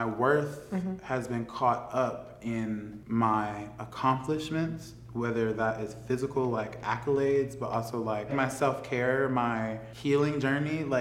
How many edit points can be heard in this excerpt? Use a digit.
3